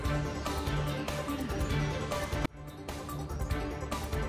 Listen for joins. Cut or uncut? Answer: uncut